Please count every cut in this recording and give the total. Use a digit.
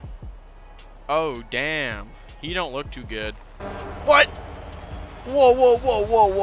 1